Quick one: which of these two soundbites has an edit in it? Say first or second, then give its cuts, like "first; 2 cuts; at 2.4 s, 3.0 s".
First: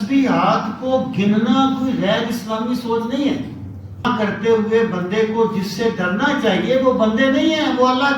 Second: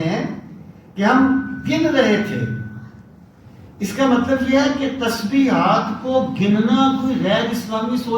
first; 1 cut; at 4.0 s